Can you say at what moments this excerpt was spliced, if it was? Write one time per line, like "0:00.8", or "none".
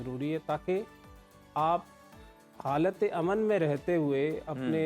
none